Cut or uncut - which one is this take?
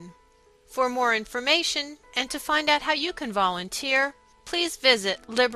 uncut